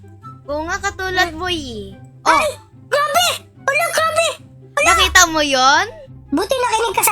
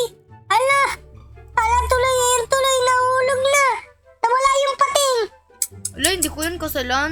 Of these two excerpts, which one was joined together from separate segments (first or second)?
first